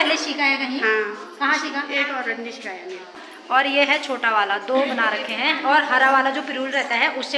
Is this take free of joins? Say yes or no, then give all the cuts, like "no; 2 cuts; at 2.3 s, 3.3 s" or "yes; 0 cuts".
no; 1 cut; at 3.2 s